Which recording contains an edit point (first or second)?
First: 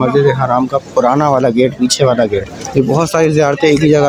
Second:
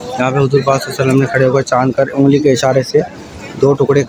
first